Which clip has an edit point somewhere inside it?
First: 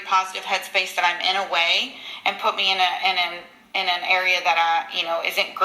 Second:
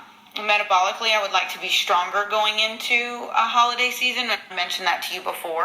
second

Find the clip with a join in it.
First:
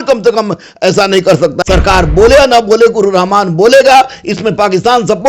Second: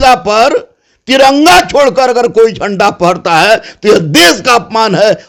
first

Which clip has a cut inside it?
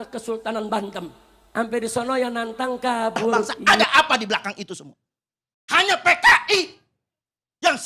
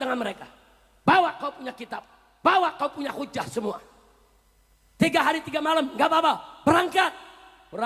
first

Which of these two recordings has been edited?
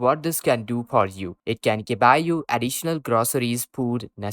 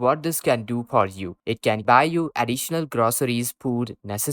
second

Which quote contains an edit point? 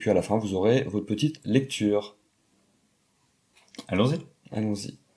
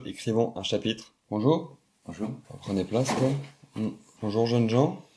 second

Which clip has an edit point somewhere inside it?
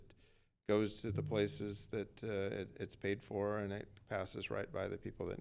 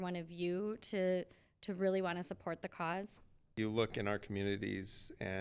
second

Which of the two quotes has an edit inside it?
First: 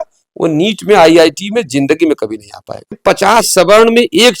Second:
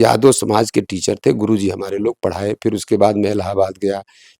first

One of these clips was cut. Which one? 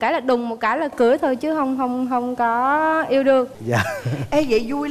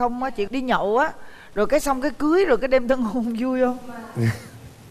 first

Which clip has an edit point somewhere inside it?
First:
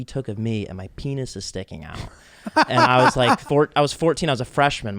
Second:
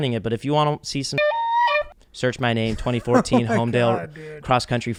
first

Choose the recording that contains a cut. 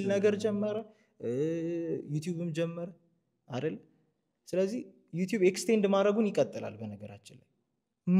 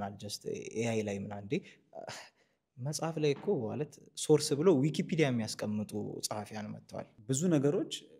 second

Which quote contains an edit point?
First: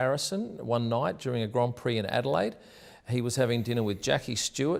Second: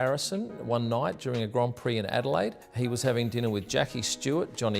second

